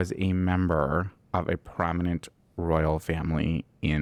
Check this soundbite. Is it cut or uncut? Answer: uncut